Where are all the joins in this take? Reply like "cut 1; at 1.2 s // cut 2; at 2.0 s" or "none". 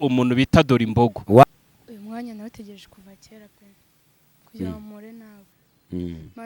cut 1; at 1.4 s